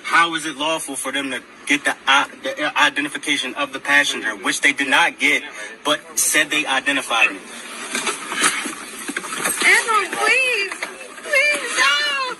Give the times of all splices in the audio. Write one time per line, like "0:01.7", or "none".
0:06.7